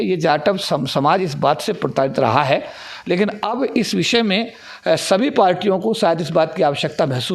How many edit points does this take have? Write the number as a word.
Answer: zero